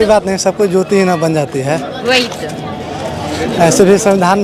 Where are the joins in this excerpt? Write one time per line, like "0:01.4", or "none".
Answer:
none

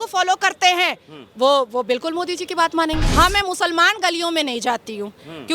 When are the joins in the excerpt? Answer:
0:03.1

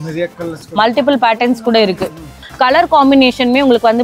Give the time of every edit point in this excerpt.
0:02.4

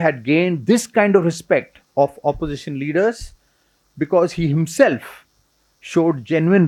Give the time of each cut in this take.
none

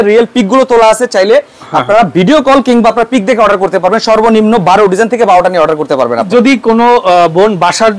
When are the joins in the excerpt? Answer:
0:06.3

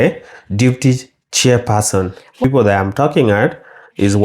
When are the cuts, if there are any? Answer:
0:02.4

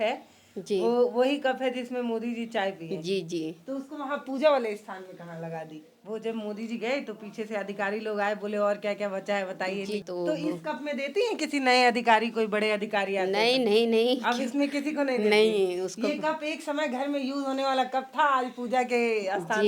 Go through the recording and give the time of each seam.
0:06.0
0:10.0

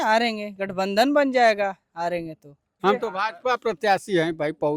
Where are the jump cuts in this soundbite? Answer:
0:02.7

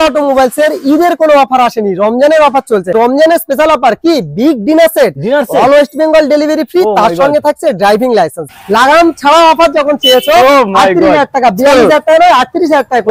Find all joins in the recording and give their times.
0:02.9
0:08.4

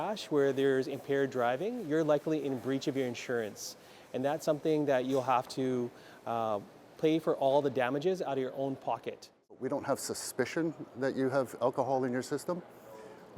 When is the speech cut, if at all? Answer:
0:09.5

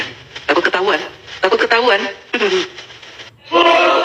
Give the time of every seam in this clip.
none

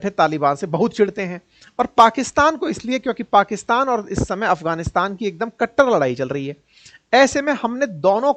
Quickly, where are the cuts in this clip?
none

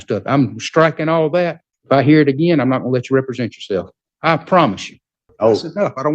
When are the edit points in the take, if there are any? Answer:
0:01.7
0:04.0
0:05.2

